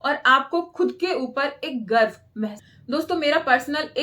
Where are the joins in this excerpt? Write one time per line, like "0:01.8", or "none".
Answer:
0:02.7